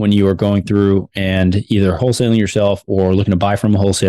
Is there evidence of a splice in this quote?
no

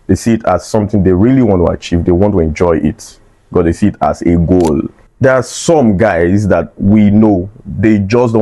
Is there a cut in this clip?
yes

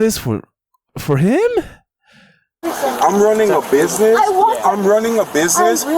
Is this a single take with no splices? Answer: no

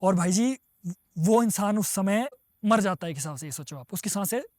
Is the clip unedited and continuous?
no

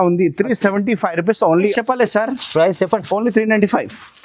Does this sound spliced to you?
yes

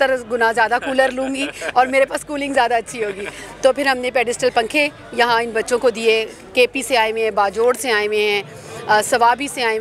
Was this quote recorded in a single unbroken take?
yes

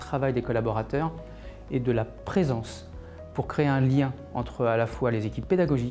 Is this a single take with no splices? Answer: yes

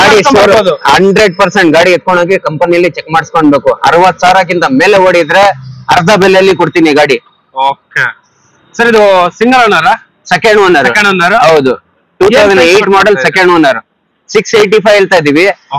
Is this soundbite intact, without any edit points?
yes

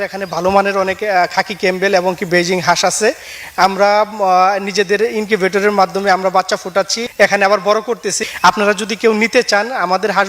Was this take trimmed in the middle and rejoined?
yes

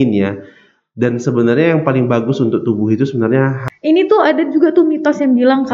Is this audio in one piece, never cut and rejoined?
no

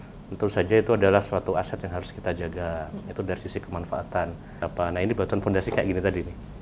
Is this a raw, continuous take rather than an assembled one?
no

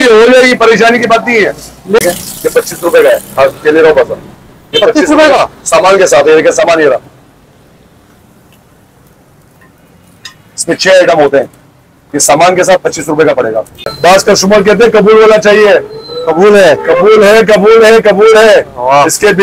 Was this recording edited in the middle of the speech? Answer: yes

